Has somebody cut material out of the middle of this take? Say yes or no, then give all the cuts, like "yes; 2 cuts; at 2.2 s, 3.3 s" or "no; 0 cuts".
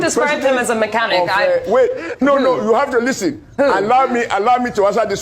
yes; 1 cut; at 1.0 s